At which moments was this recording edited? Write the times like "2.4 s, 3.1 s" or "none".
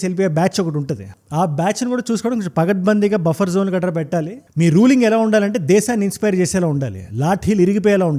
none